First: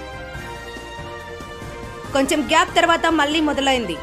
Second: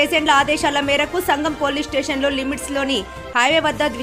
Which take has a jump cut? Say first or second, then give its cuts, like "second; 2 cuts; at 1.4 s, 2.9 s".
first; 1 cut; at 1.9 s